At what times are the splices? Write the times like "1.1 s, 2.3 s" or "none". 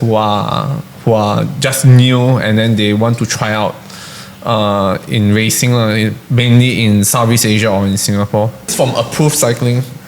8.7 s

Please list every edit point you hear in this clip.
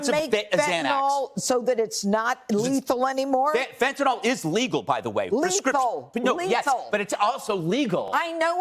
none

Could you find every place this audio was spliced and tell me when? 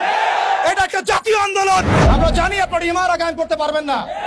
1.9 s

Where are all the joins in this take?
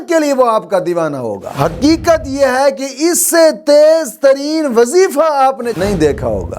1.4 s

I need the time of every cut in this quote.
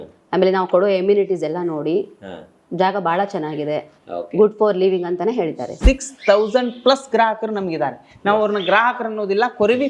5.7 s

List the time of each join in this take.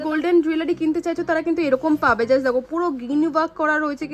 none

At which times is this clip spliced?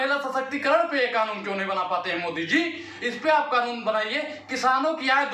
none

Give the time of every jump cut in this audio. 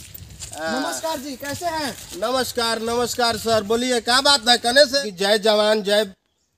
4.9 s

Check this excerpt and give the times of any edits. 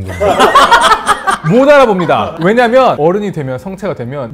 2.3 s

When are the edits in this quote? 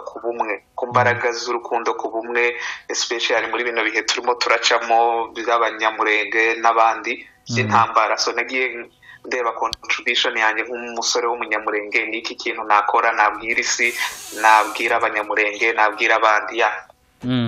none

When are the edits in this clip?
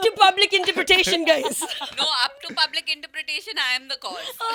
none

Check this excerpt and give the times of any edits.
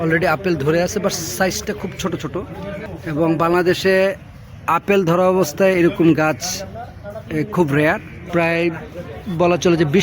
2.9 s, 8.3 s

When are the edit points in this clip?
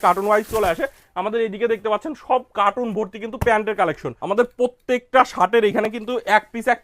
4.1 s

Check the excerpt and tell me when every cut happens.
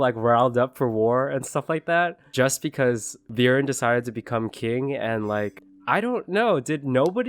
2.2 s, 3.2 s, 5.7 s

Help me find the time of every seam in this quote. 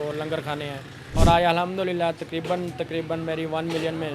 1.0 s

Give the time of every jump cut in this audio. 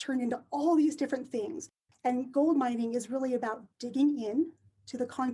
1.8 s

